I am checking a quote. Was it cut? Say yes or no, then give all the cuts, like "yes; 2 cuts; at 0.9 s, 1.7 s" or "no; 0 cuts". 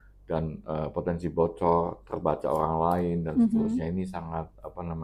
no; 0 cuts